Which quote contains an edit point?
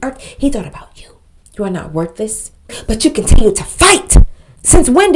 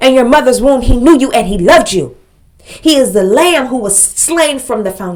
first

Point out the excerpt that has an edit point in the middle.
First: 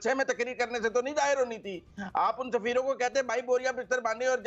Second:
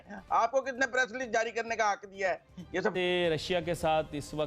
second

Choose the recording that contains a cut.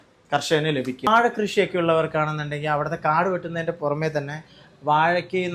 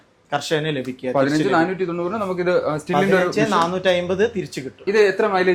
first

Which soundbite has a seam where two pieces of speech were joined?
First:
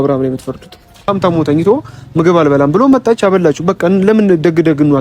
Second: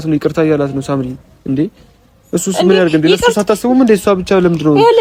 first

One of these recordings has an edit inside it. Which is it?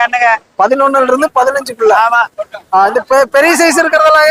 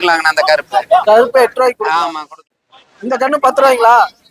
second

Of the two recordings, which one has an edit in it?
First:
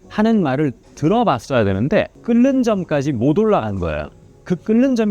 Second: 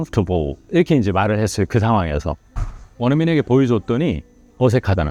first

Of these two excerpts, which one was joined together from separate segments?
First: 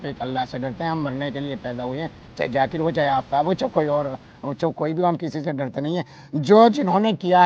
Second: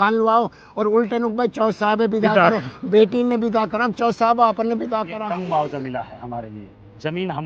second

